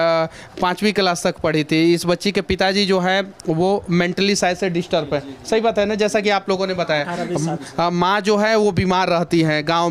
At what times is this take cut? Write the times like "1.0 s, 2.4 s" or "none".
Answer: none